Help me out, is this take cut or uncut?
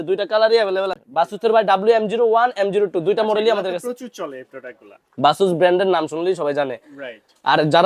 cut